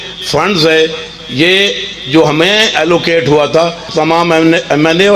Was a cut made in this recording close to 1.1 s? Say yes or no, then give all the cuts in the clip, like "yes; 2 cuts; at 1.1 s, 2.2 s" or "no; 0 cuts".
no; 1 cut; at 3.8 s